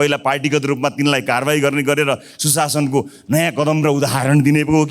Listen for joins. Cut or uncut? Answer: uncut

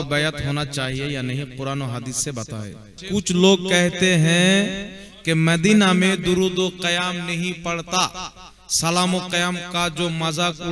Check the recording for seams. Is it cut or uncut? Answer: cut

